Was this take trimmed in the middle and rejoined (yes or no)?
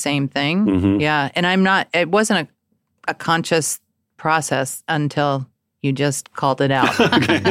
no